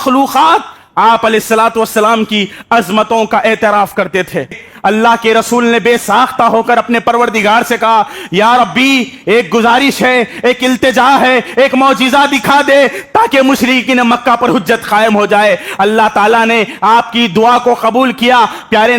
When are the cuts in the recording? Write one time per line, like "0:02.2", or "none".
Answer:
0:04.7